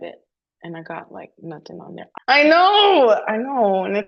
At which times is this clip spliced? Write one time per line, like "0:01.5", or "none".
0:02.2